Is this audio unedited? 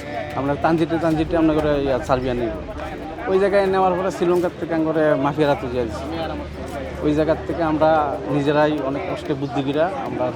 yes; 0 cuts

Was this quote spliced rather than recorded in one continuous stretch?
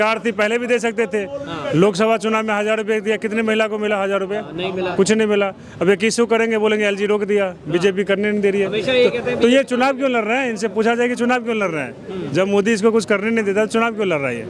no; 0 cuts

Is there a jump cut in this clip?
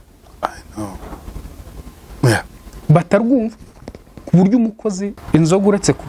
yes; 1 cut; at 5.2 s

